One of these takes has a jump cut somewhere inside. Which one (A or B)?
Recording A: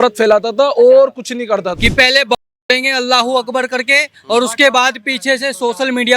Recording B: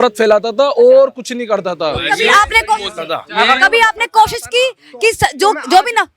A